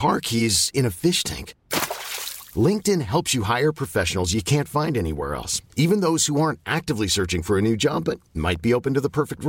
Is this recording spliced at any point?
no; 0 cuts

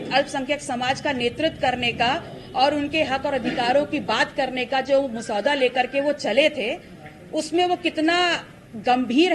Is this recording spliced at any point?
no; 0 cuts

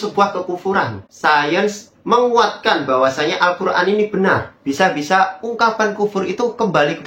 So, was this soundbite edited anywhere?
yes; 2 cuts; at 1.0 s, 4.6 s

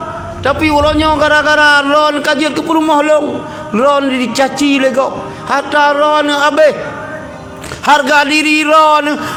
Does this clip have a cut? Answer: no; 0 cuts

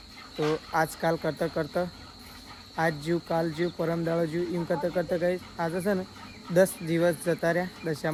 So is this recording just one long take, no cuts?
yes; 0 cuts

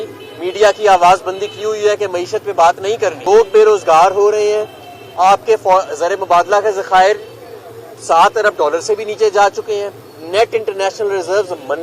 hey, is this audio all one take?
no; 1 cut; at 3.2 s

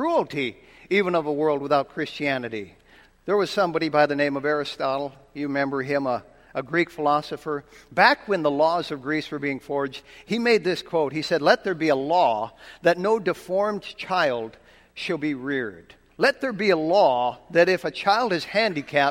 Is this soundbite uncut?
yes; 0 cuts

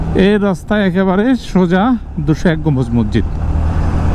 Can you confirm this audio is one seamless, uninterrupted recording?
yes; 0 cuts

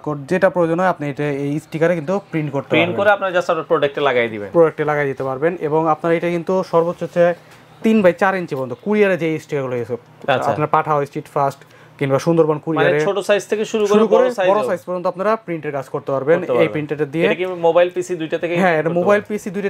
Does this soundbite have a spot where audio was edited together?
no; 0 cuts

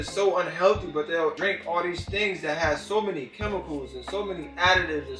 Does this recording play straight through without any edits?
yes; 0 cuts

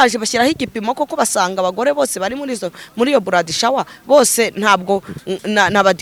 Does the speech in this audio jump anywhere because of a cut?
no; 0 cuts

